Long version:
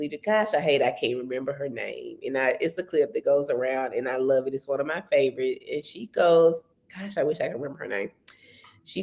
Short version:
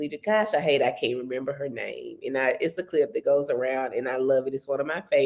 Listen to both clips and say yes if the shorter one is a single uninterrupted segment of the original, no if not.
yes